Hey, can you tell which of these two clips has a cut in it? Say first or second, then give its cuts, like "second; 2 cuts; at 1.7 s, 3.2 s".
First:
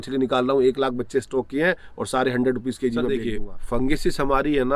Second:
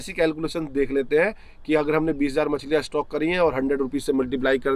first; 1 cut; at 3.2 s